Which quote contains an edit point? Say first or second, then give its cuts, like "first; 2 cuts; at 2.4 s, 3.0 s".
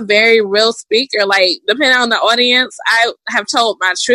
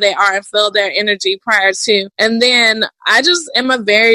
second; 1 cut; at 2.1 s